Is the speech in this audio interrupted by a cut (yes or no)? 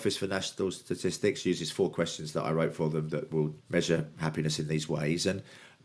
yes